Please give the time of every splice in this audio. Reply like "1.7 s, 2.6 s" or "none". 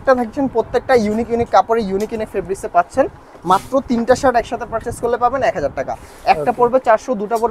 none